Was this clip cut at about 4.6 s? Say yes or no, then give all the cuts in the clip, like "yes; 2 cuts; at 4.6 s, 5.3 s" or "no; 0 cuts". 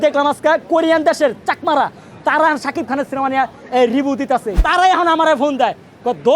yes; 1 cut; at 4.6 s